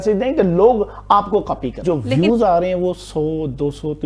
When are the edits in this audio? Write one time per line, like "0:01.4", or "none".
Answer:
0:01.8